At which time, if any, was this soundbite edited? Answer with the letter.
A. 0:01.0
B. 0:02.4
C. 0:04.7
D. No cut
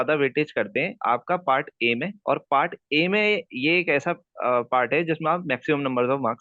D